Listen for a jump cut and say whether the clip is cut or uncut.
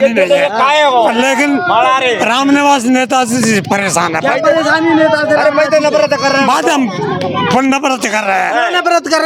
uncut